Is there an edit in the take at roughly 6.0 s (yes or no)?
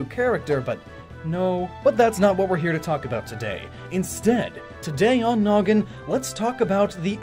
yes